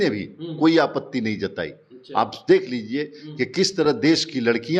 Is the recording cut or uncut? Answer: uncut